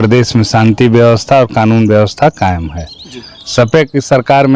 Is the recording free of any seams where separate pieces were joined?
yes; 0 cuts

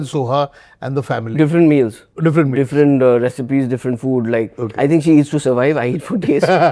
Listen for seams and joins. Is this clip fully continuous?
no; 1 cut; at 2.0 s

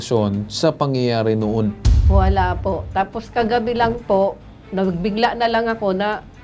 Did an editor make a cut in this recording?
no; 0 cuts

